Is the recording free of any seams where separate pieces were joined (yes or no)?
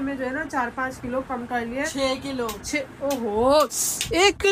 yes